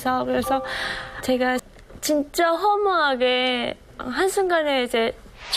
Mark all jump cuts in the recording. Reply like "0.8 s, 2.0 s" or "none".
1.7 s